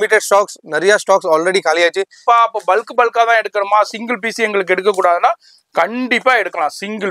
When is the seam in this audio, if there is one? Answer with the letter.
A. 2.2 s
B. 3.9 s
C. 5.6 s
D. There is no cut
A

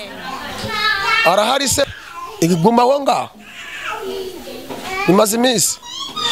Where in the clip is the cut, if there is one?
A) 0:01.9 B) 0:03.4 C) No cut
A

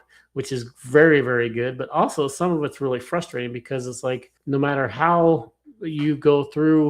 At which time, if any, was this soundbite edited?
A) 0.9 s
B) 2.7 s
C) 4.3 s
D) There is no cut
C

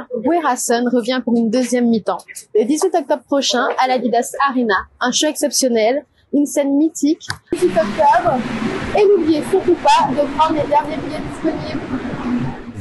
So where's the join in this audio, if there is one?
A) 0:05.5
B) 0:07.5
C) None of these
B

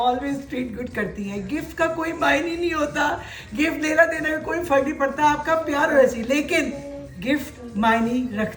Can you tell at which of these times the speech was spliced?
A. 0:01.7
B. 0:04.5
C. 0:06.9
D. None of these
D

